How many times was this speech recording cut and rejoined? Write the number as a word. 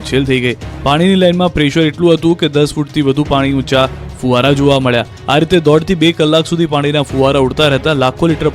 one